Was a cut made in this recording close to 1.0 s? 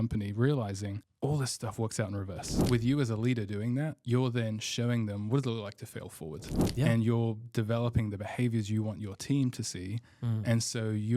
yes; 2 cuts; at 1.0 s, 2.5 s

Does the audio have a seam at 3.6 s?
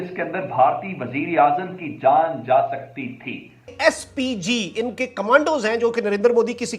yes; 1 cut; at 3.6 s

